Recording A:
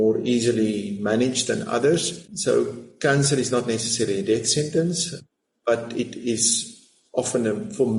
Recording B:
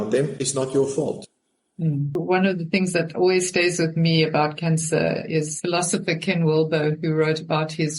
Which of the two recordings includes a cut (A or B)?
B